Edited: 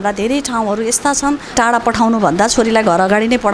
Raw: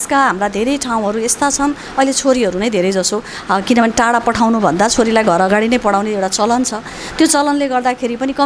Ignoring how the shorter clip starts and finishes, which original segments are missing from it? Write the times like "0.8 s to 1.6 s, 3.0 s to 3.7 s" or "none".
1.9 s to 3.9 s